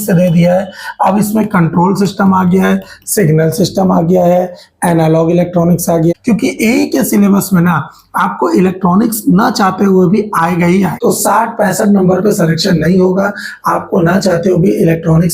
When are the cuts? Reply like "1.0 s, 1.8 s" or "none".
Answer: 6.1 s, 10.9 s